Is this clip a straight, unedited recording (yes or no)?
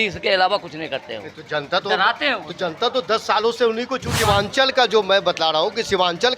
no